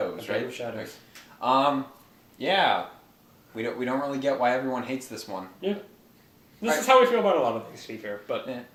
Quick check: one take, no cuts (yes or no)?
yes